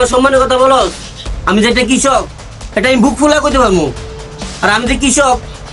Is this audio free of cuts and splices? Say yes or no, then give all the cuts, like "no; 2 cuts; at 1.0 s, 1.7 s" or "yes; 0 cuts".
yes; 0 cuts